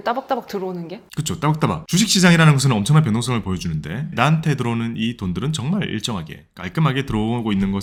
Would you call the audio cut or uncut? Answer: uncut